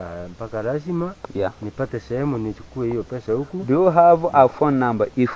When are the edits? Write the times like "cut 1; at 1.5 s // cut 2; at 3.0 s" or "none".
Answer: none